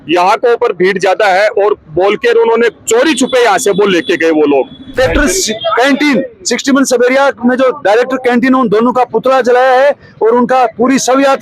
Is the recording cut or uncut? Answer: cut